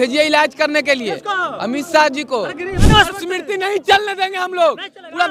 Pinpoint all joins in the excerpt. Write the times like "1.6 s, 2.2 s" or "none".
2.8 s